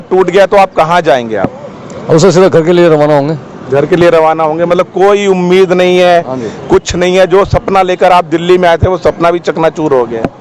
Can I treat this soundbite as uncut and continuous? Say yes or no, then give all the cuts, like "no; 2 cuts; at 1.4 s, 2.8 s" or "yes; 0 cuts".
yes; 0 cuts